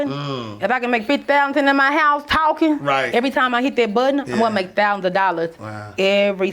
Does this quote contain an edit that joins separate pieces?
yes; 1 cut; at 3.1 s

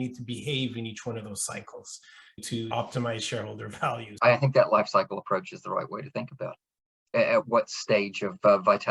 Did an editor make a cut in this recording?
yes; 1 cut; at 4.1 s

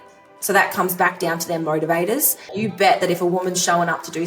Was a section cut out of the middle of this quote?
yes; 1 cut; at 2.5 s

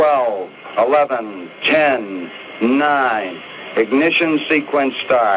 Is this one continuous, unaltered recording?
no; 1 cut; at 4.4 s

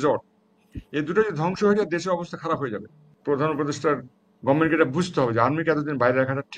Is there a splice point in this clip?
yes; 1 cut; at 3.1 s

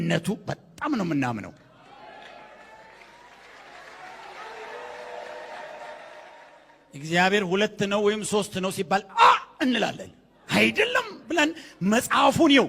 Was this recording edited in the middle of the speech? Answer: yes; 1 cut; at 6.4 s

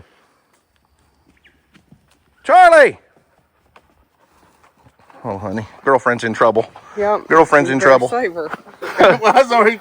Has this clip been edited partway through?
yes; 1 cut; at 8.8 s

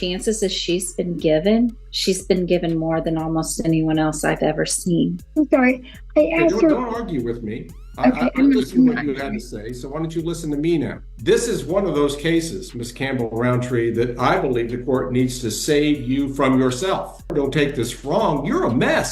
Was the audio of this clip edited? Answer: yes; 4 cuts; at 1.9 s, 5.2 s, 11.0 s, 17.3 s

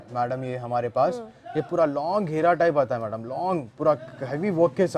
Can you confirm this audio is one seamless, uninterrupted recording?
yes; 0 cuts

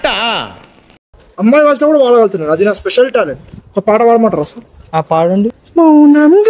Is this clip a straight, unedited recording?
no; 2 cuts; at 1.1 s, 5.6 s

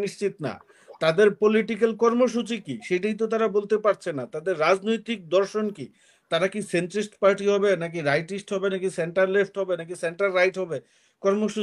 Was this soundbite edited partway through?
no; 0 cuts

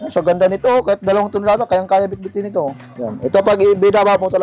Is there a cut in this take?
yes; 1 cut; at 2.9 s

